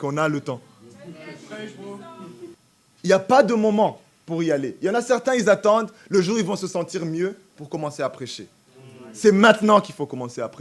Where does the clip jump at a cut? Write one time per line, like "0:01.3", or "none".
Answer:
0:02.5